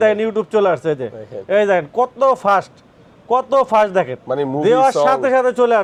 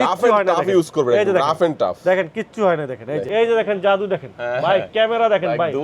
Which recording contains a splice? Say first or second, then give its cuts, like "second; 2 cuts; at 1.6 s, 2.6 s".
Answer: second; 1 cut; at 3.2 s